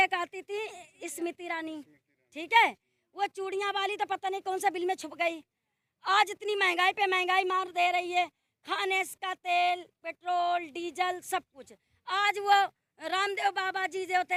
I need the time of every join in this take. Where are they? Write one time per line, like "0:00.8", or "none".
none